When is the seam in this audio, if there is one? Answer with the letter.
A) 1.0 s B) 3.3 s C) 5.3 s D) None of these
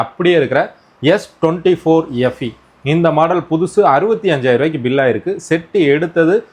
D